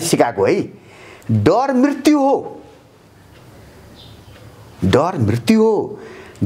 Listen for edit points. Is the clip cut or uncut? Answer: uncut